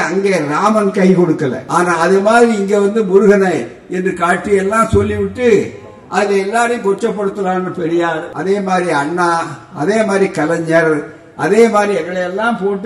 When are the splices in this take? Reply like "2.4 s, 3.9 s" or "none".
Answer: 1.6 s, 8.3 s